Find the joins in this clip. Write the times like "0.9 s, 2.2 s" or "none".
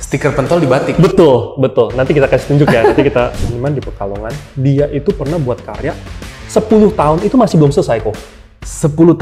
3.3 s